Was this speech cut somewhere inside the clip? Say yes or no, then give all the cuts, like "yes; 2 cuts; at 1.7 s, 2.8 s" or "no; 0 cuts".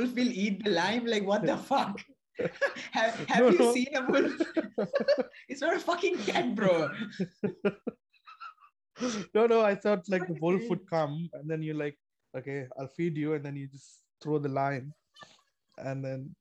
no; 0 cuts